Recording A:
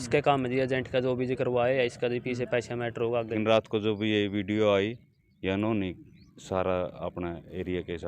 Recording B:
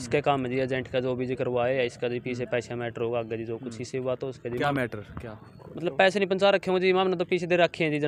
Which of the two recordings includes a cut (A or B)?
A